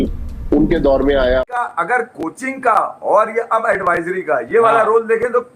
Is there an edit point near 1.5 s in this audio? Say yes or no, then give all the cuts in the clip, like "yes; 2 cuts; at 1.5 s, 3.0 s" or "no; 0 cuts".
yes; 1 cut; at 1.5 s